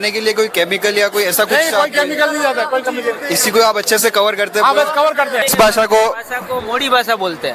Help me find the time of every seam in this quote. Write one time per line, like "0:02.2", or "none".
0:05.5